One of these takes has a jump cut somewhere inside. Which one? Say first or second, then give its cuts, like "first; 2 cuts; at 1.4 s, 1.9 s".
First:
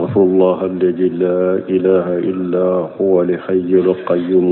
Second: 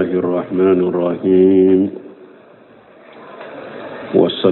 first; 1 cut; at 1.4 s